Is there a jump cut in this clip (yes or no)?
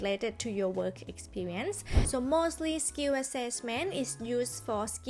yes